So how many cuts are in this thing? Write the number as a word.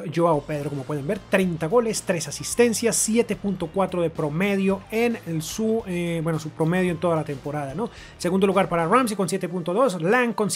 zero